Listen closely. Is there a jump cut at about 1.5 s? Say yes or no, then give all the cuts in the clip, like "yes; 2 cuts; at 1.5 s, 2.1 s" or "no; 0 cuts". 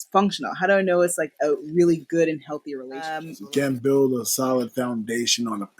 no; 1 cut; at 3.3 s